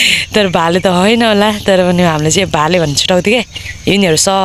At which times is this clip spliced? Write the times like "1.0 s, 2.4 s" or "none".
none